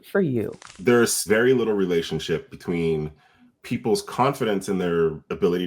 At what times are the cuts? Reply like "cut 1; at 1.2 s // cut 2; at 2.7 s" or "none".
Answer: cut 1; at 1.1 s